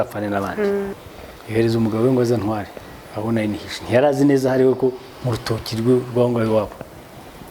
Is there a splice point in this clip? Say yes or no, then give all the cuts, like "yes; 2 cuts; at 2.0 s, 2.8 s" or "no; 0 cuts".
yes; 1 cut; at 0.9 s